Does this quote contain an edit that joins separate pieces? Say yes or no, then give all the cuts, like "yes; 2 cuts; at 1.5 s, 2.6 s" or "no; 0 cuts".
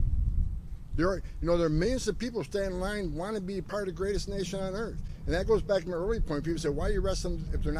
no; 0 cuts